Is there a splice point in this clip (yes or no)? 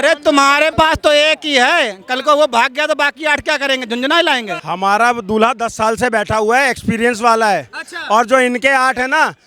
yes